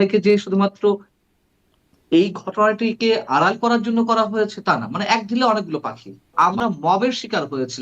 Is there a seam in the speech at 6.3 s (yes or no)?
yes